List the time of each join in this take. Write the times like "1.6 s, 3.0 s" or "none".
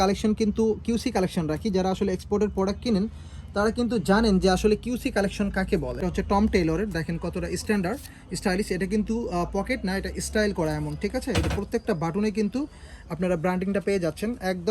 6.0 s